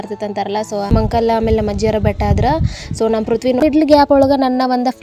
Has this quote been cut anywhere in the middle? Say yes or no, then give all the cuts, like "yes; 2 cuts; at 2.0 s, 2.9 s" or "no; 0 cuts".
yes; 2 cuts; at 0.9 s, 3.6 s